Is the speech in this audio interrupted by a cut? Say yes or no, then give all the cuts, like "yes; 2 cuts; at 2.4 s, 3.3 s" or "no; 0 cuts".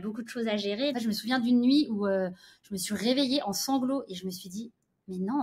yes; 1 cut; at 0.9 s